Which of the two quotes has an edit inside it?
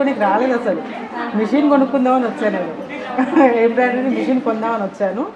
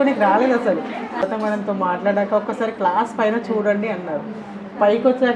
second; 1 cut; at 1.2 s

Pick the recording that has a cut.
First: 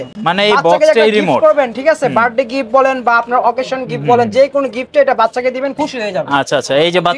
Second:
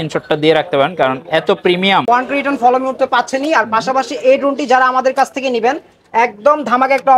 second; 1 cut; at 2.1 s

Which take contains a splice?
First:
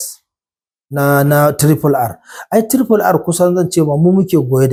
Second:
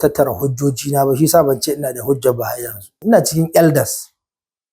second; 1 cut; at 2.9 s

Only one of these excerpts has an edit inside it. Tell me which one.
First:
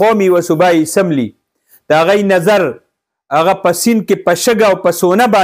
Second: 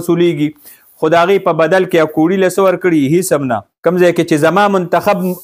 second; 1 cut; at 3.7 s

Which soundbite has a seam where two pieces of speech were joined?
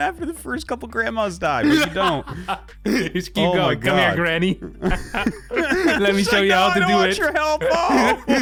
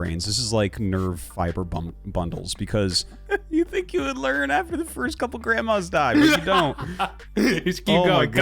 second; 1 cut; at 3.2 s

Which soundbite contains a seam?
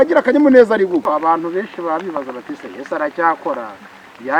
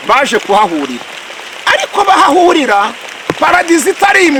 first; 1 cut; at 1.1 s

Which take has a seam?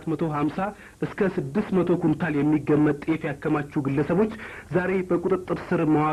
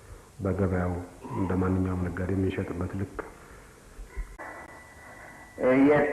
second; 1 cut; at 4.3 s

